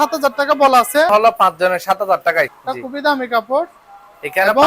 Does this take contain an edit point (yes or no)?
yes